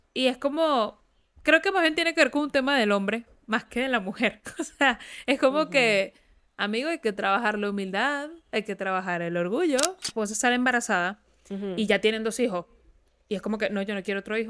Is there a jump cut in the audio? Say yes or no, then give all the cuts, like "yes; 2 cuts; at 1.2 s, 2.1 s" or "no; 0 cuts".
yes; 1 cut; at 10.1 s